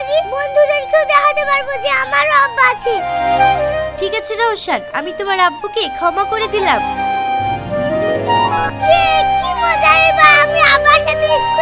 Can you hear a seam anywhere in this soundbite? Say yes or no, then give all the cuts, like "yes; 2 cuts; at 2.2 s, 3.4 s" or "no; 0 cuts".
no; 0 cuts